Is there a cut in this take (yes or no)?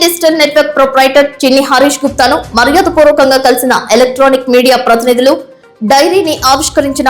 no